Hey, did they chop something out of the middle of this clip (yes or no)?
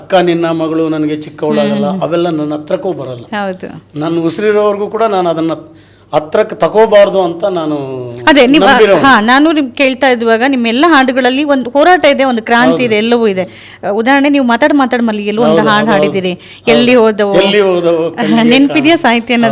no